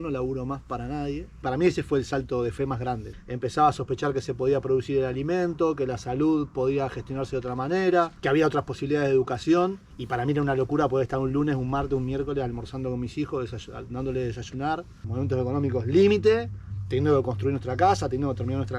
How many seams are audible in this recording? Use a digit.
3